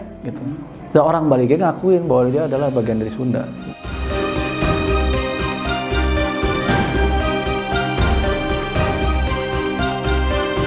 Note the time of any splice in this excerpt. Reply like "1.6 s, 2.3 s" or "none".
none